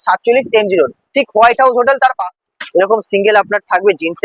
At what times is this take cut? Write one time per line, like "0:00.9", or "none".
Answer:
0:02.4